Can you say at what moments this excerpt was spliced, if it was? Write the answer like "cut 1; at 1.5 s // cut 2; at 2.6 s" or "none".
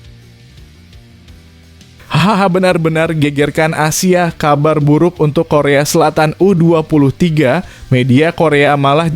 cut 1; at 2.0 s